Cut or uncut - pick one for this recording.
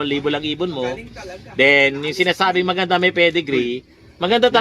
uncut